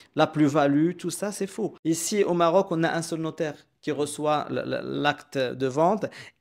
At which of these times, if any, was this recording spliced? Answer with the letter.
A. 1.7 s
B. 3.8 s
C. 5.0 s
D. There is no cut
A